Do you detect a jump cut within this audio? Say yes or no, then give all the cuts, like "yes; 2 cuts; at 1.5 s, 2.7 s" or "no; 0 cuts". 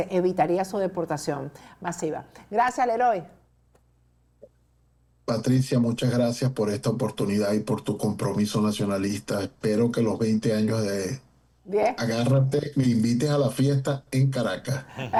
no; 0 cuts